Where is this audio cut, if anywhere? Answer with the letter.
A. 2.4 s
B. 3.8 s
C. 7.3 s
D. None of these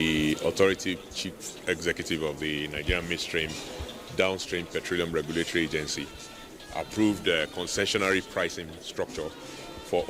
C